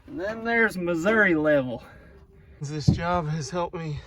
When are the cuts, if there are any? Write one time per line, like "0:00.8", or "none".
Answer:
0:02.6